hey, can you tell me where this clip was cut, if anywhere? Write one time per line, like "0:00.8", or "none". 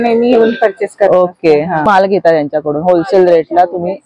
0:01.9